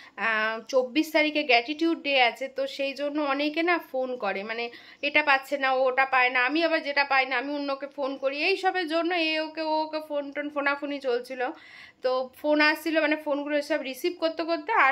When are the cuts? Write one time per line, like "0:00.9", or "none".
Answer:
none